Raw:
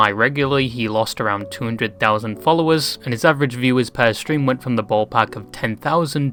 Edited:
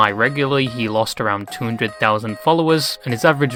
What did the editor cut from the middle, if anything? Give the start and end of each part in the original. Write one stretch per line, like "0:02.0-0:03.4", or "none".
none